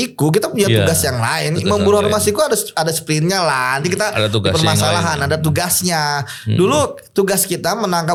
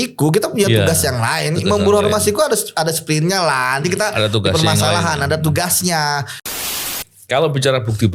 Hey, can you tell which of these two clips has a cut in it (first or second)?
second